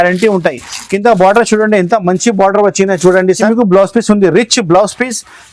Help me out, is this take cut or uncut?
cut